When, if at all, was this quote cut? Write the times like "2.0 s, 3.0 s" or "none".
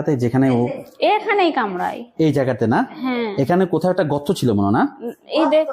none